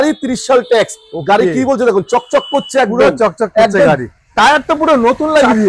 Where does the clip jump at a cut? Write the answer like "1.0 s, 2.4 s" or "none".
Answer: none